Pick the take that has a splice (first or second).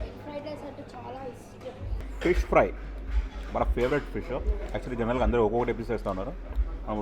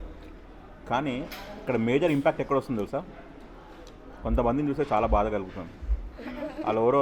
first